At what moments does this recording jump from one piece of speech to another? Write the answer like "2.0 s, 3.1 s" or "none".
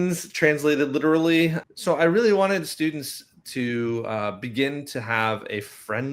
1.6 s